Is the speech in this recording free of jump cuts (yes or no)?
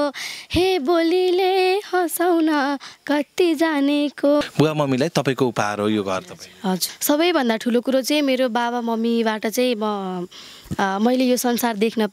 no